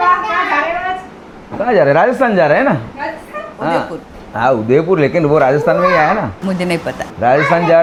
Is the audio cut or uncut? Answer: uncut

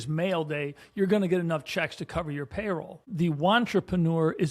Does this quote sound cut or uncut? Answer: cut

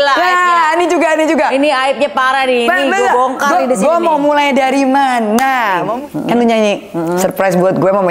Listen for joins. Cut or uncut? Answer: cut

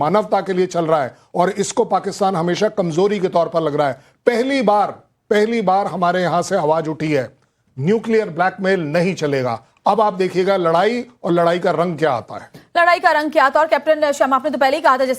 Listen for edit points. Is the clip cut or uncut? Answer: cut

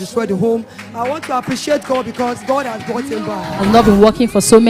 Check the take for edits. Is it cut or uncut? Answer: cut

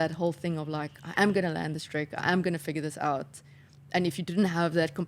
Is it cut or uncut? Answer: uncut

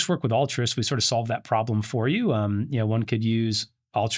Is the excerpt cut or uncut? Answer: uncut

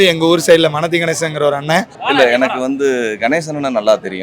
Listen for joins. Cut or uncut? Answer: cut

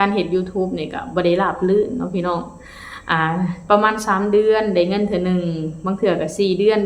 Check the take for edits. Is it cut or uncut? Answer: uncut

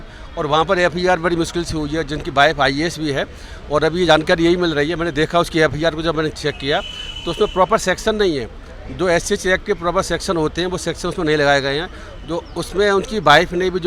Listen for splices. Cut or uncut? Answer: uncut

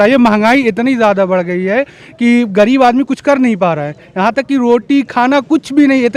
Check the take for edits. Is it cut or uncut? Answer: uncut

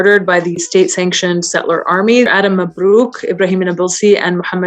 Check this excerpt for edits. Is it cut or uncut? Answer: cut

